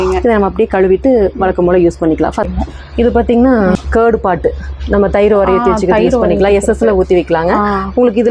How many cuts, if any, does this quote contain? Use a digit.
2